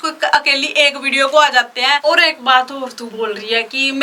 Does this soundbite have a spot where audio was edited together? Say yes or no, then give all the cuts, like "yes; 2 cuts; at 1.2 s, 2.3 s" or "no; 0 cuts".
yes; 2 cuts; at 2.0 s, 3.0 s